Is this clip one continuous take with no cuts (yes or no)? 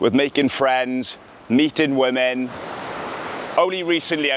yes